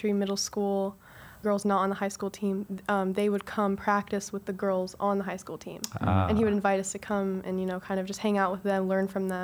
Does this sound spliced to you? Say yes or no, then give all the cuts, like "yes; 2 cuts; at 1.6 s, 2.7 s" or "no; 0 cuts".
yes; 1 cut; at 1.4 s